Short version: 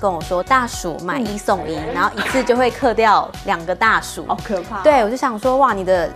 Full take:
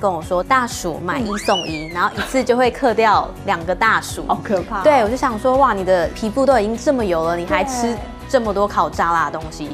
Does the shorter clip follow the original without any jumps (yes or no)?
yes